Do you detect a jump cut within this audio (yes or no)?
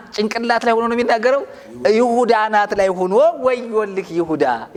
no